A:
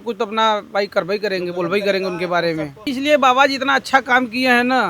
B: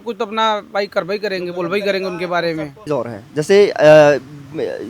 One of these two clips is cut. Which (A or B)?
A